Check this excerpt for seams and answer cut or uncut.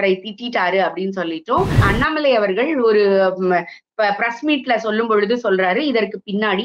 cut